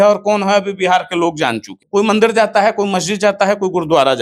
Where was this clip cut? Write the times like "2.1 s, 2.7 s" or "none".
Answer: 1.8 s